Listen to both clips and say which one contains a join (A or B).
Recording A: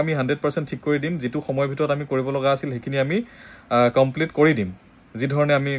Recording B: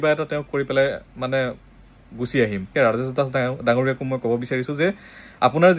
B